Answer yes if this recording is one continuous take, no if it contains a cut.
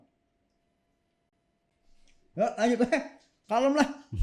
yes